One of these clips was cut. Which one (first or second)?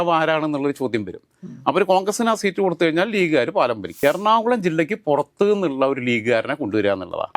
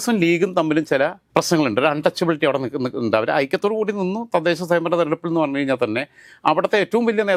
first